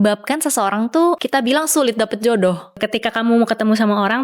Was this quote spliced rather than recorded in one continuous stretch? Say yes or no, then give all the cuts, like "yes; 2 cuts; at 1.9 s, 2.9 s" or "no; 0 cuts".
yes; 2 cuts; at 1.2 s, 2.8 s